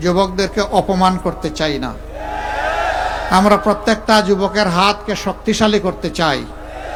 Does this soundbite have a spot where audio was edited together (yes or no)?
no